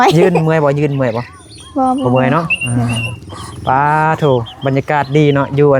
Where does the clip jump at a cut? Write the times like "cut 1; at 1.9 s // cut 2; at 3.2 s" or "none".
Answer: none